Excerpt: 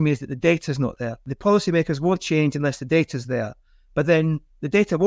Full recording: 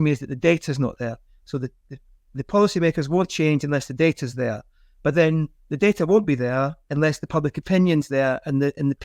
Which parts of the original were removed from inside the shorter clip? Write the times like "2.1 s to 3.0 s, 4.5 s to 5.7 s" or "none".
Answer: 1.2 s to 2.3 s